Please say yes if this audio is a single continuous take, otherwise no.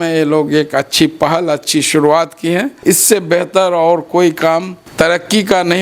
no